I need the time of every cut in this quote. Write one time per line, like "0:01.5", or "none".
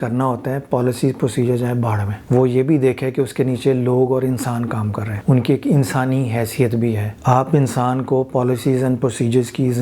0:02.1
0:05.1
0:07.1